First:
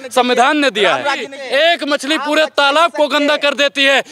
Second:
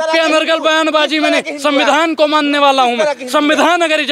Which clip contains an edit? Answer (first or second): first